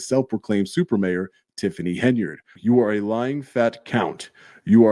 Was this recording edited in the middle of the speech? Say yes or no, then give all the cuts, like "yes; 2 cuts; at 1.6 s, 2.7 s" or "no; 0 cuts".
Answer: yes; 1 cut; at 2.4 s